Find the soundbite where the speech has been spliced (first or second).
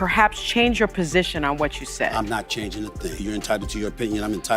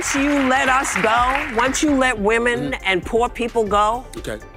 first